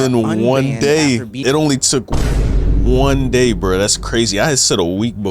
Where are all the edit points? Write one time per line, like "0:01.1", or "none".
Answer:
0:01.3